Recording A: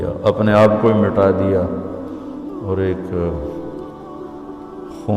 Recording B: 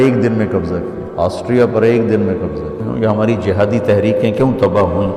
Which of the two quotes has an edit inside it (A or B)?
B